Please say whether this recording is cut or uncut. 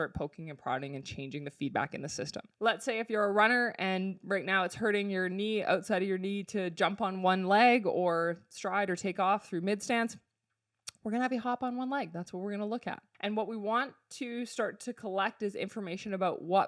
cut